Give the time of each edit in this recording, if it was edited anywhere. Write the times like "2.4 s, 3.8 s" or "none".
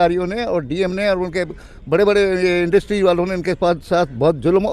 none

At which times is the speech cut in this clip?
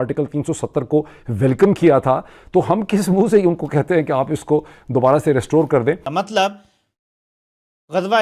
6.0 s

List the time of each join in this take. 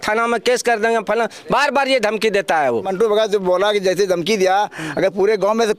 2.9 s

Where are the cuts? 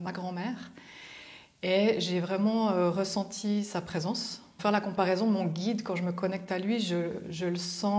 4.5 s

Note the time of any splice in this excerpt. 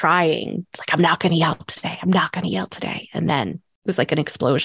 3.7 s

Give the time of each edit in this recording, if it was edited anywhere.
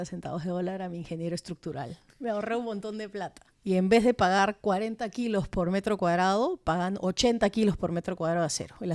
3.4 s

